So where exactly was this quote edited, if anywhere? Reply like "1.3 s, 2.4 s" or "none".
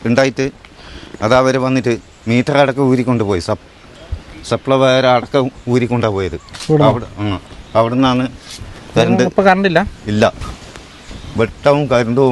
none